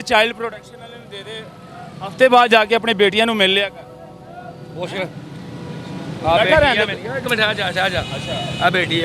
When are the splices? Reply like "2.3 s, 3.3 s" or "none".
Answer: none